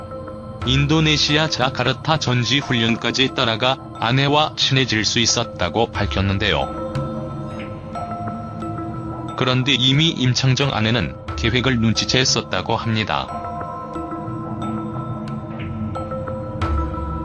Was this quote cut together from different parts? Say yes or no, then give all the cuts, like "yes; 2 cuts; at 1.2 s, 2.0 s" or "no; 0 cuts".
yes; 1 cut; at 8.2 s